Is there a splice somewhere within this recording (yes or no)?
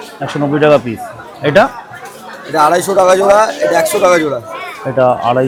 no